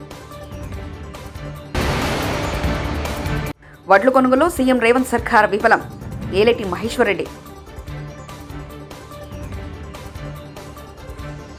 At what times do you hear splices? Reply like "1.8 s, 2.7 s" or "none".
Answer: none